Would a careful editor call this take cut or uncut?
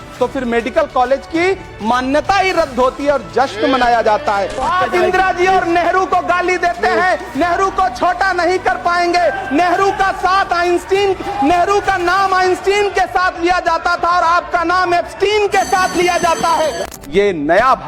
cut